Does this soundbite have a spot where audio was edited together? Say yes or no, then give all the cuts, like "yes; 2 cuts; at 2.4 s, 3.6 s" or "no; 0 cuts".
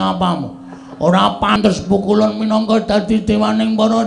yes; 1 cut; at 1.6 s